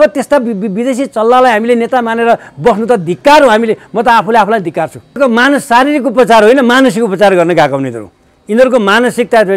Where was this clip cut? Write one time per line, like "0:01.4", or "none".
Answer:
0:05.2

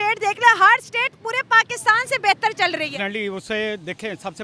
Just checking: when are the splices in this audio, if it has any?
0:02.9

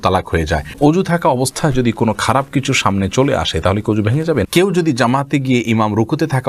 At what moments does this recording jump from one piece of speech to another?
0:00.7
0:04.5

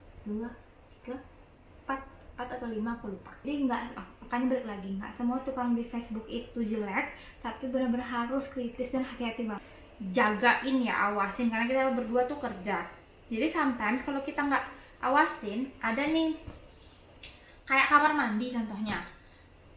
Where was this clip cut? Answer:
0:03.4
0:09.7

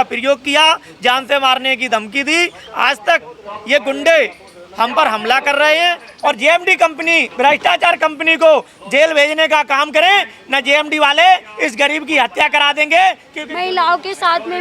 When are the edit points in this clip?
0:06.1
0:13.3

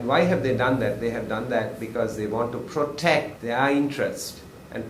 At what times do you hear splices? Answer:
0:03.3

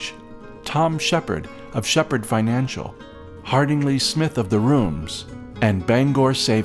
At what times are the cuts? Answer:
none

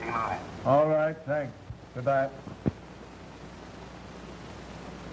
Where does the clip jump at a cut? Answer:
0:03.3

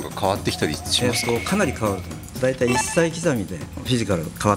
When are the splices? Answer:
0:02.4
0:03.8

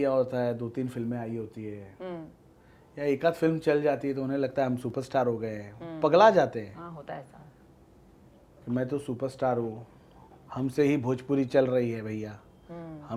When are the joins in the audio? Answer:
none

